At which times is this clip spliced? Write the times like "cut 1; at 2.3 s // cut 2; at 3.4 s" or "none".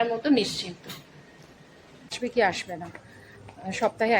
cut 1; at 2.2 s